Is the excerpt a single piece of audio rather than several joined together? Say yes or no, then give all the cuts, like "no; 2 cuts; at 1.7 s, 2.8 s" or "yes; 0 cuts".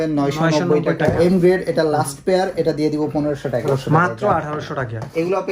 no; 2 cuts; at 1.2 s, 3.6 s